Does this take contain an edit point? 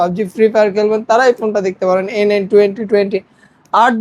no; 0 cuts

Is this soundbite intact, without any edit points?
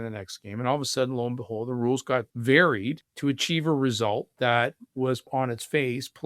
no; 3 cuts; at 2.3 s, 3.1 s, 5.3 s

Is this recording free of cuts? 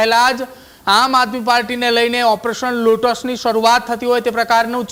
yes; 0 cuts

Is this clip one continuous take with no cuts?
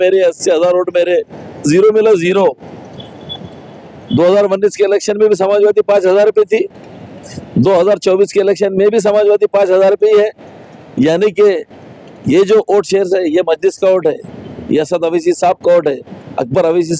yes; 0 cuts

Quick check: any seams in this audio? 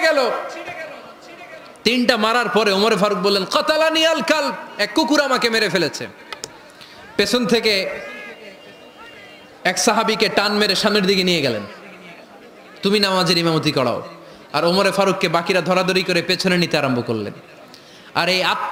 no; 0 cuts

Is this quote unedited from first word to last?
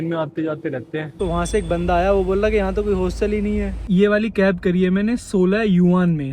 no; 2 cuts; at 1.1 s, 3.8 s

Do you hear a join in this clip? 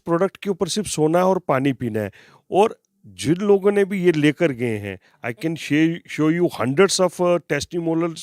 no; 0 cuts

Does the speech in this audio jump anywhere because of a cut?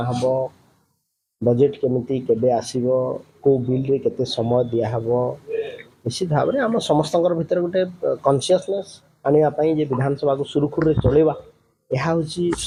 no; 0 cuts

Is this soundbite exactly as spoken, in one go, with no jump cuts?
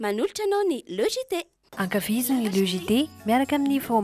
yes; 0 cuts

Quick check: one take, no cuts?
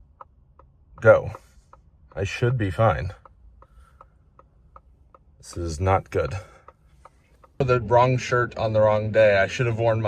no; 1 cut; at 7.6 s

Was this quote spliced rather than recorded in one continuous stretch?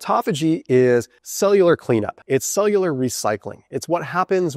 yes; 2 cuts; at 1.2 s, 2.2 s

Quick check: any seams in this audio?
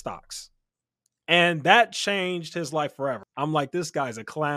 yes; 1 cut; at 3.2 s

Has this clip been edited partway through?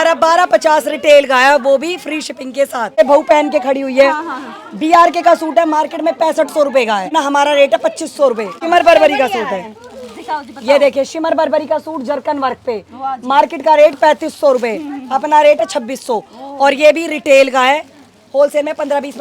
yes; 3 cuts; at 3.0 s, 7.1 s, 8.5 s

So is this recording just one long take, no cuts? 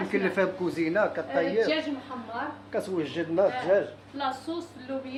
yes; 0 cuts

